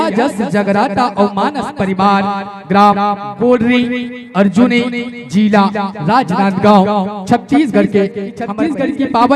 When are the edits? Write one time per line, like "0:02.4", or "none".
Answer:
0:08.4